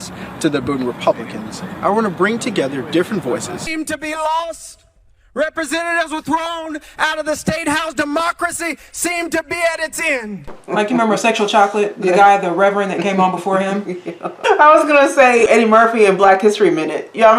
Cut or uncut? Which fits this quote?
cut